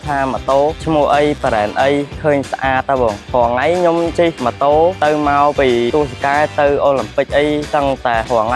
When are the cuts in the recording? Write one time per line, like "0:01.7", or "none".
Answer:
0:03.2